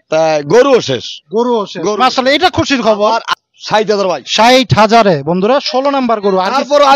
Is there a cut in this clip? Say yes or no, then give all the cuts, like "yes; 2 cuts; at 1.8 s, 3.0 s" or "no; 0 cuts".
yes; 1 cut; at 3.3 s